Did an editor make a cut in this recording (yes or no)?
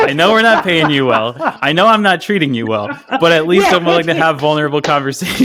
no